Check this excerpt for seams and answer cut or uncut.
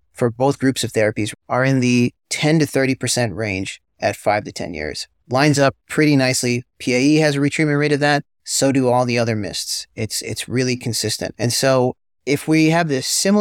cut